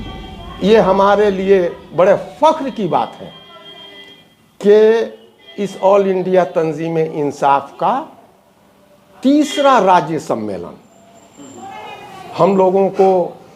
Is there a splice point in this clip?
no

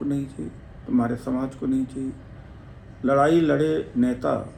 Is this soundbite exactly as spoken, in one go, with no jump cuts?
yes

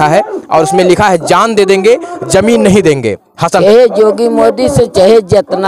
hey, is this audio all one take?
no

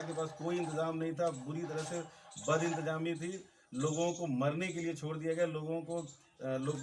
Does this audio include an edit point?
no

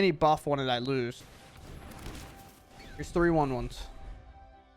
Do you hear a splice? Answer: yes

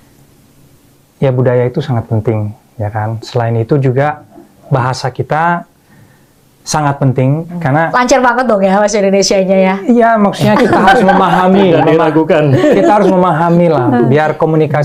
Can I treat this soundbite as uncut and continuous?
yes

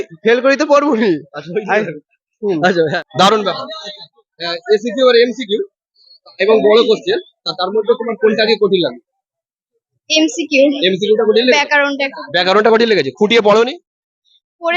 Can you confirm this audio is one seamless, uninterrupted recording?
no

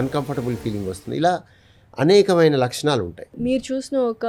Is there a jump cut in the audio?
yes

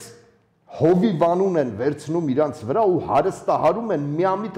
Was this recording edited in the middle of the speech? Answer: no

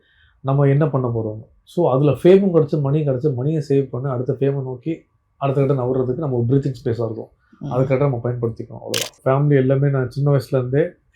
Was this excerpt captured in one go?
no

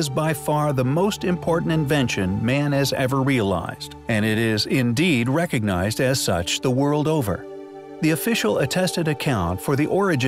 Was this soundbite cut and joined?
yes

